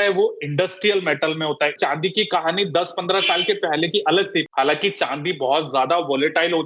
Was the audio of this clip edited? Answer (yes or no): yes